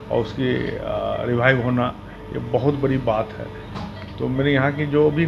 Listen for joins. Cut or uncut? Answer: uncut